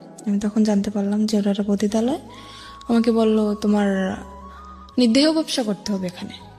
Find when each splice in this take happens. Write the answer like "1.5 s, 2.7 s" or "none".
none